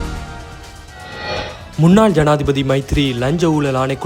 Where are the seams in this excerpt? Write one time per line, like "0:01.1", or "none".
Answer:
0:01.8